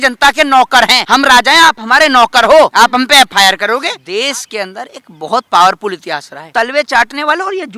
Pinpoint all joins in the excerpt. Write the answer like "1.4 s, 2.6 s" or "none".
1.0 s, 2.7 s, 4.0 s, 6.3 s